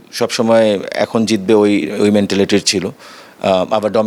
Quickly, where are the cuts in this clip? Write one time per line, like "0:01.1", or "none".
none